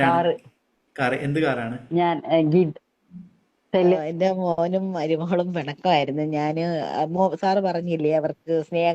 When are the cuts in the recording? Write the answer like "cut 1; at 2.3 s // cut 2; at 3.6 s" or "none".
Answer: cut 1; at 4.0 s

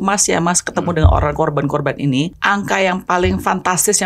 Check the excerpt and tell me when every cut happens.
cut 1; at 2.4 s

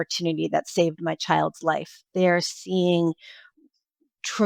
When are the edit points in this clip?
cut 1; at 2.1 s

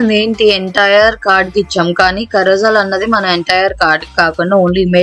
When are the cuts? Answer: none

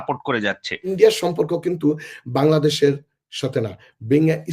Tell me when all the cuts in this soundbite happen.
cut 1; at 0.9 s

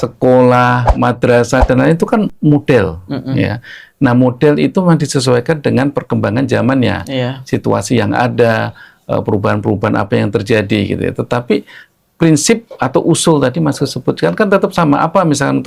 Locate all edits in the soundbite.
none

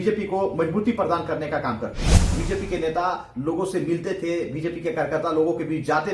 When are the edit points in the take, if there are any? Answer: cut 1; at 2.4 s

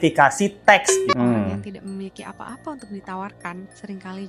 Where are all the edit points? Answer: cut 1; at 1.1 s

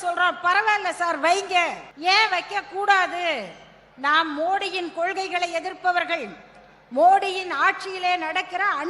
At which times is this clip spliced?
cut 1; at 1.9 s

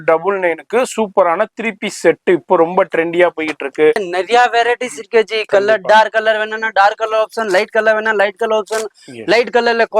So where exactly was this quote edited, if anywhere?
cut 1; at 4.1 s

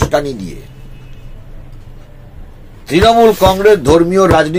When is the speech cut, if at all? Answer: none

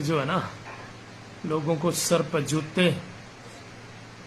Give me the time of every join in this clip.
none

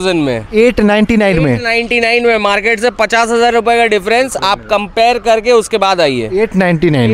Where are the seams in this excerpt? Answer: none

